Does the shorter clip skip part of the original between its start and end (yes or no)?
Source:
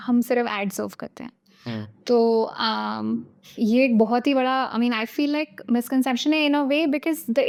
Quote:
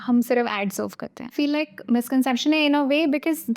yes